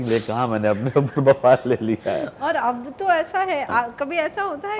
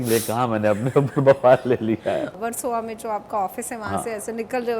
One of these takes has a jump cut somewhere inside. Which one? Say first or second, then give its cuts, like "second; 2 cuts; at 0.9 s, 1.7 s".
second; 1 cut; at 2.3 s